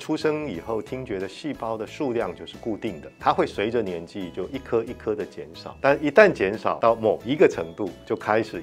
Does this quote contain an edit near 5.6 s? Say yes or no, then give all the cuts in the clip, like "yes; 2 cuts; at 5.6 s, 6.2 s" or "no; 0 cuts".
yes; 3 cuts; at 3.1 s, 5.6 s, 6.8 s